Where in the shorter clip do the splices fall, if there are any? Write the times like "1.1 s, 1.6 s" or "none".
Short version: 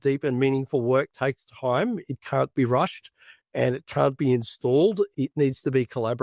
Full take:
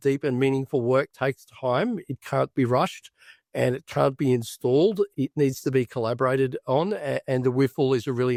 none